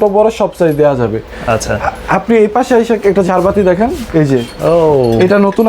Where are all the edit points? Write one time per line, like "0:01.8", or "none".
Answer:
none